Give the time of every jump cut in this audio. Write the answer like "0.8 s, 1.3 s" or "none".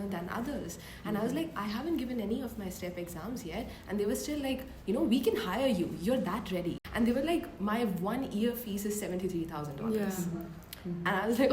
6.8 s